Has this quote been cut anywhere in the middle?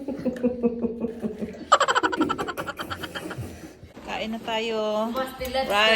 yes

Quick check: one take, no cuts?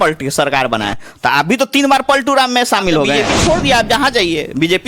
no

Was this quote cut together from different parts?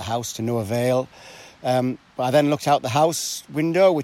no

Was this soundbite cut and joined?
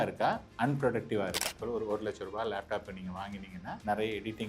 yes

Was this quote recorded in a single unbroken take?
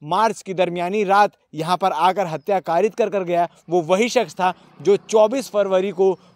yes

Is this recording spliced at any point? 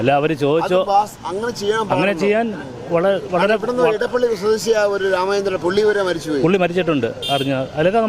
no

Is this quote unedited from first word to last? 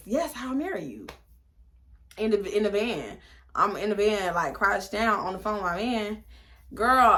yes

